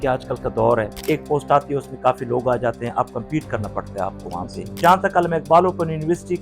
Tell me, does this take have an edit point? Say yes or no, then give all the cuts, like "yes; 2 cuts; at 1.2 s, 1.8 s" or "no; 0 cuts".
yes; 2 cuts; at 1.0 s, 4.8 s